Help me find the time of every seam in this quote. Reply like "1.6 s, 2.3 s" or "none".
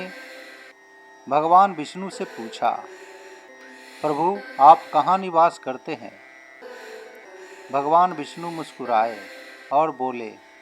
6.1 s, 7.4 s